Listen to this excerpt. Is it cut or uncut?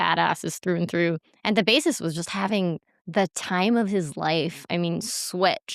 cut